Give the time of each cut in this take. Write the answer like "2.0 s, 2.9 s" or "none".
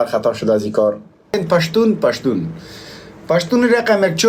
1.3 s